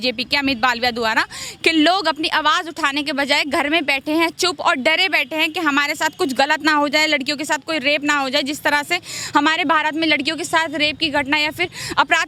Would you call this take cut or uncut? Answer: uncut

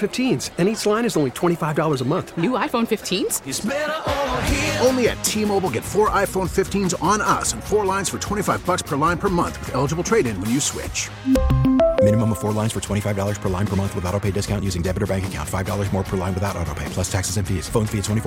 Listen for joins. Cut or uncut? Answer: uncut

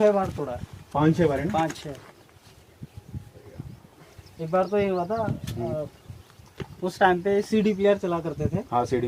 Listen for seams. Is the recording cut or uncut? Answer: uncut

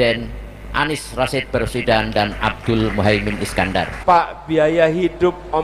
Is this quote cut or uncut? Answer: cut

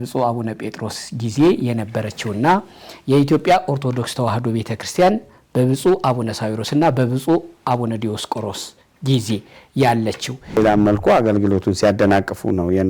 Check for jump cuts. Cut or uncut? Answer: cut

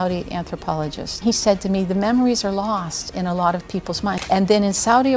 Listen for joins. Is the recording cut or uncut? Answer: cut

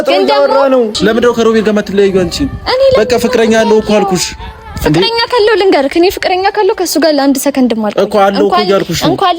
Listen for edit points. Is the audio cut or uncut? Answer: cut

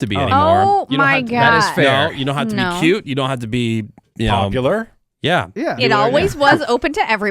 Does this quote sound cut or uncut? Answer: cut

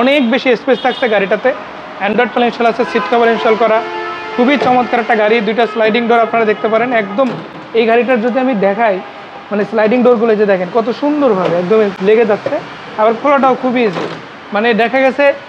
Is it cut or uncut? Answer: uncut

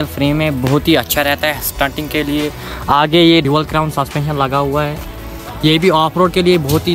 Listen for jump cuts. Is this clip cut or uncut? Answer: uncut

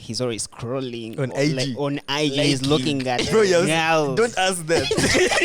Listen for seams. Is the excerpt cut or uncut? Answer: uncut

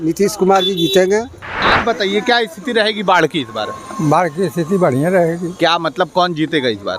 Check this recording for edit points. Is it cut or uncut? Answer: cut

